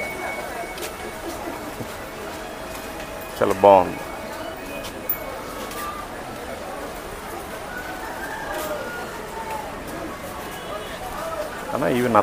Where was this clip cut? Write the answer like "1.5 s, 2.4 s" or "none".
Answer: none